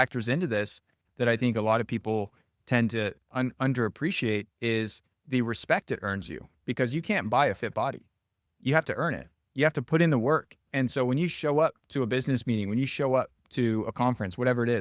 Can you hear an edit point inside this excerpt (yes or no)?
no